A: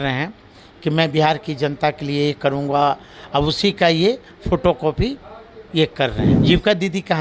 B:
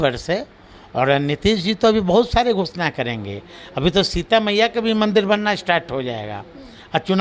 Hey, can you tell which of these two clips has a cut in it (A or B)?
A